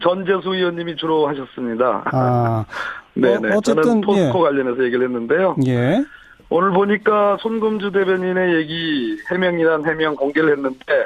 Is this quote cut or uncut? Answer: cut